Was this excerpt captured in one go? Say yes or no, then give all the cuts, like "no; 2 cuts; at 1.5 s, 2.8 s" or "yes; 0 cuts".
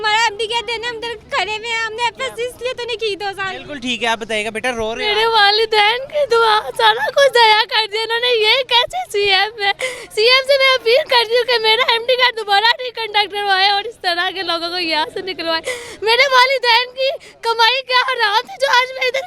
yes; 0 cuts